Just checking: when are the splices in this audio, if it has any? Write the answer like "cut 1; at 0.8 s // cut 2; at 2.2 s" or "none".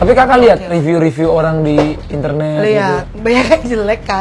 cut 1; at 3.1 s